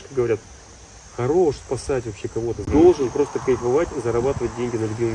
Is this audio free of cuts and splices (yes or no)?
no